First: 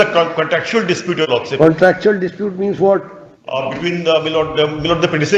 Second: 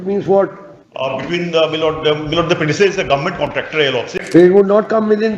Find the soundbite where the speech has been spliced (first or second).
second